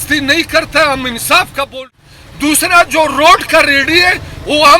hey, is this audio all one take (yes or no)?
no